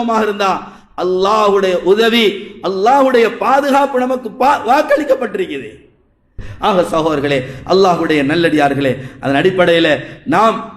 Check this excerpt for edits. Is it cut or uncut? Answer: cut